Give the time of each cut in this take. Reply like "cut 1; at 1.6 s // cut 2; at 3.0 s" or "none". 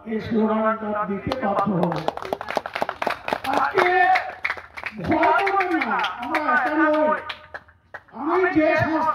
none

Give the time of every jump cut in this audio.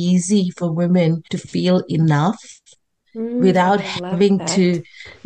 cut 1; at 1.3 s

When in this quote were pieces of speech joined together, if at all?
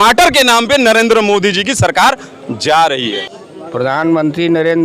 cut 1; at 3.1 s

